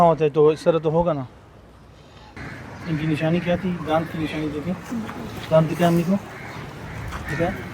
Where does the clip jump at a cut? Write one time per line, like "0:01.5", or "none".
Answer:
0:02.2

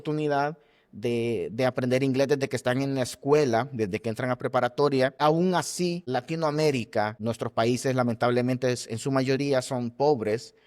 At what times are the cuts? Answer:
0:05.2
0:06.0
0:07.2

